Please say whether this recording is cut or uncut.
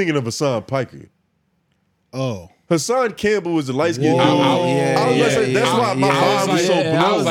uncut